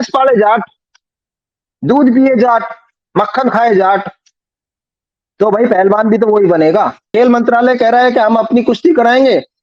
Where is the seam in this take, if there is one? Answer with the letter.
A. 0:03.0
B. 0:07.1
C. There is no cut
B